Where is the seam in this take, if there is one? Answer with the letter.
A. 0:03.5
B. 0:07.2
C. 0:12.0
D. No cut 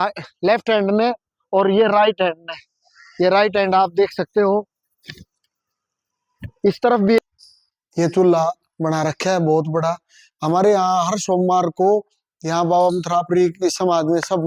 B